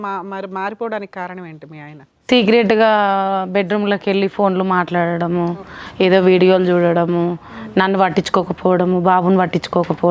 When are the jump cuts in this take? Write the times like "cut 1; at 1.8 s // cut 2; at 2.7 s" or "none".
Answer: none